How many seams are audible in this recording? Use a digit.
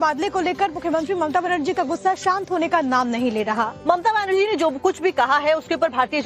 1